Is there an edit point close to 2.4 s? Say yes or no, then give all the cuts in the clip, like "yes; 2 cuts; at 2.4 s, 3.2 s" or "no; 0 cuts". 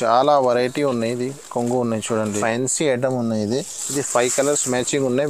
yes; 1 cut; at 2.4 s